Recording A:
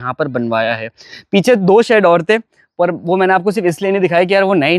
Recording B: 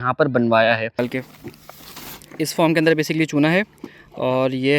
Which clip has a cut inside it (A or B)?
B